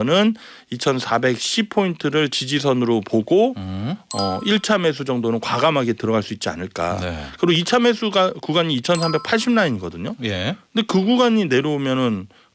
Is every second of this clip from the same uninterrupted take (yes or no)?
yes